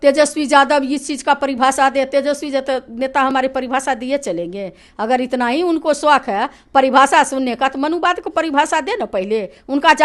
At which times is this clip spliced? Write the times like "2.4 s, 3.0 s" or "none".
none